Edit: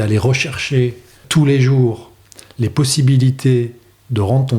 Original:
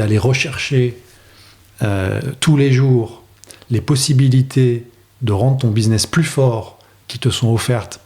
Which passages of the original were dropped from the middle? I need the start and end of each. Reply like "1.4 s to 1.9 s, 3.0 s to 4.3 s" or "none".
1.2 s to 2.3 s